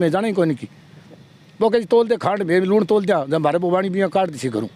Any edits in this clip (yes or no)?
no